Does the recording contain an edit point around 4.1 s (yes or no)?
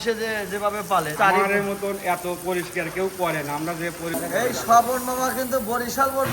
yes